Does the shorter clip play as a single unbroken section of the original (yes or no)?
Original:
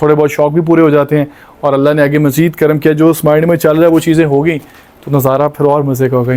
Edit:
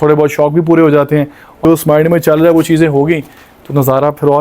no